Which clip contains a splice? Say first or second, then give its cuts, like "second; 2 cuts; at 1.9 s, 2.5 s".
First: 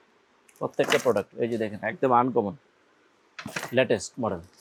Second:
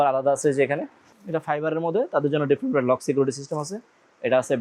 second; 1 cut; at 1.1 s